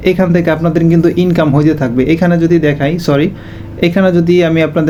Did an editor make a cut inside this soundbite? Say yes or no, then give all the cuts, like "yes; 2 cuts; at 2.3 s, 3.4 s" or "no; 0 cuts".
no; 0 cuts